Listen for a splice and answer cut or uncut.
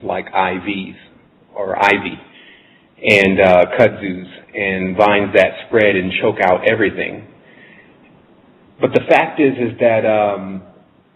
uncut